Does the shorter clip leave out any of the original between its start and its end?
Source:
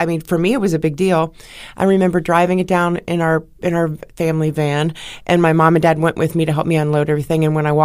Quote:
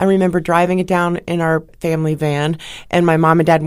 yes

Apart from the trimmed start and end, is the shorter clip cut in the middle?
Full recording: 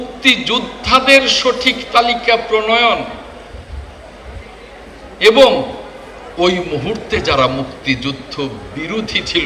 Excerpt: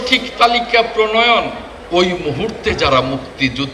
yes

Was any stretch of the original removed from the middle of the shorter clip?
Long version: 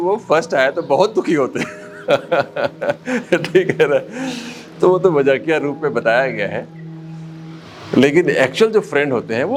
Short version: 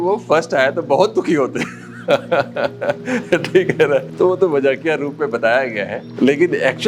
yes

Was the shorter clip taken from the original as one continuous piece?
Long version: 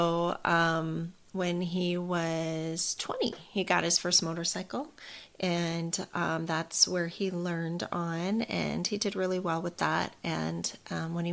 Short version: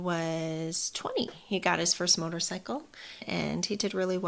no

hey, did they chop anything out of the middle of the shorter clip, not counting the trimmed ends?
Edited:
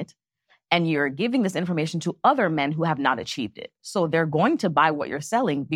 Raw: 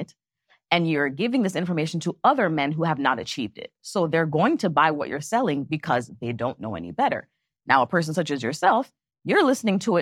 no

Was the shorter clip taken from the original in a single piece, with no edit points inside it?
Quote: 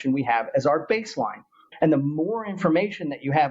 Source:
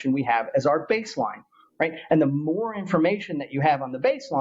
no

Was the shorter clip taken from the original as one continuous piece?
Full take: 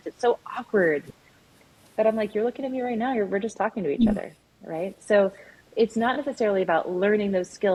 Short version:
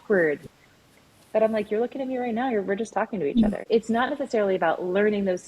no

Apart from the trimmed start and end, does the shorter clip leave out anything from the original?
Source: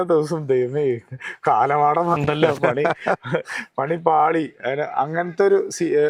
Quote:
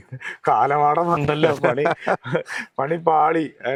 no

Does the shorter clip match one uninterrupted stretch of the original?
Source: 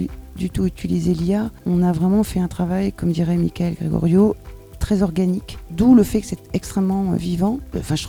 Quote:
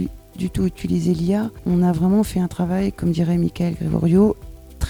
yes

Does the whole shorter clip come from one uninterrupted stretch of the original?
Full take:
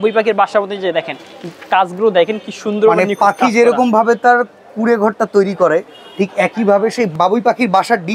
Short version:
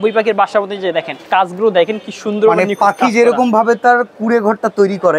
no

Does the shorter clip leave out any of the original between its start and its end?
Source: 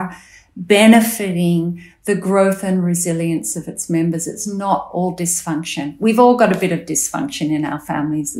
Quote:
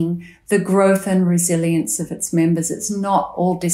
no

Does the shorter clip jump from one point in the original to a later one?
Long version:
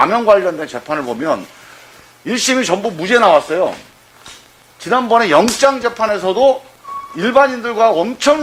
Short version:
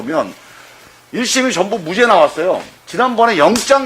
yes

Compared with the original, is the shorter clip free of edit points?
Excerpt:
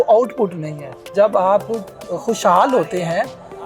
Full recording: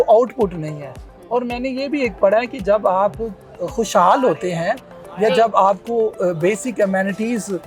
no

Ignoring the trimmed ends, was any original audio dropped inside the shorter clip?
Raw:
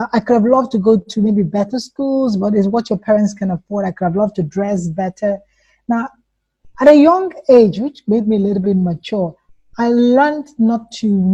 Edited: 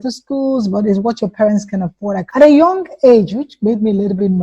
yes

